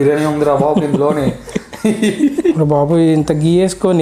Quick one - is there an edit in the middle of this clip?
yes; 1 cut; at 2.3 s

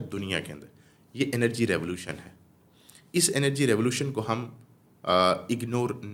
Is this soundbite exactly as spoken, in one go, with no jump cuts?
yes; 0 cuts

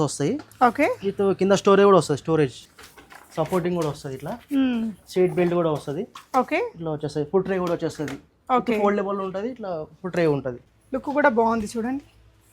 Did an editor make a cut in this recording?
yes; 2 cuts; at 2.6 s, 10.6 s

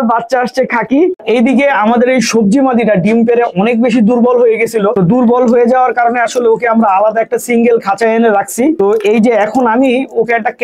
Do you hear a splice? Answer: yes; 1 cut; at 1.2 s

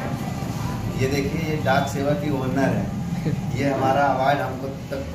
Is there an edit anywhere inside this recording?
no; 0 cuts

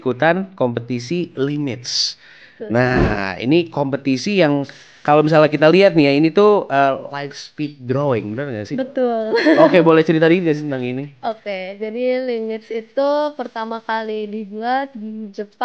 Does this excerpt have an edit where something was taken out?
no; 0 cuts

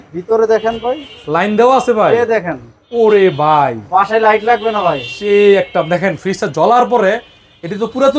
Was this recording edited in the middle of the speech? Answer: no; 0 cuts

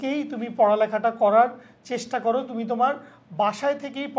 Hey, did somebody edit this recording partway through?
no; 0 cuts

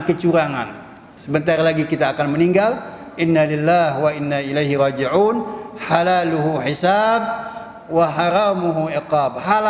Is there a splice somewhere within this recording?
yes; 1 cut; at 1.1 s

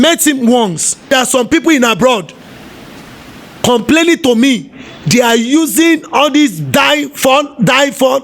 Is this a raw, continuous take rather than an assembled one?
no; 1 cut; at 1.1 s

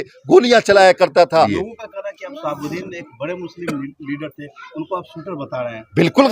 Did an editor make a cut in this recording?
yes; 1 cut; at 1.6 s

